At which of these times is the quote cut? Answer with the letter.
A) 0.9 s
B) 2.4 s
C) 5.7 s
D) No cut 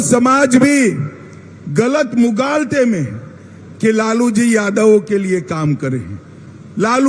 D